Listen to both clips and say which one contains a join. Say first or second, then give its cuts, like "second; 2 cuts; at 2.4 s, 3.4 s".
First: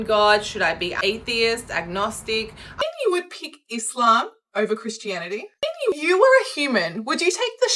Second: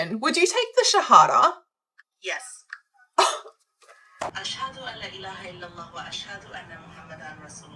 first; 2 cuts; at 2.8 s, 5.9 s